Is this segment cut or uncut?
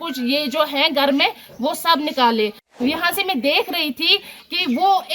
cut